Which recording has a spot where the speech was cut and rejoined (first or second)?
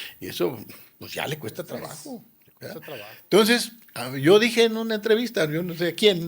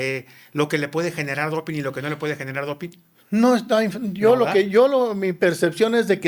first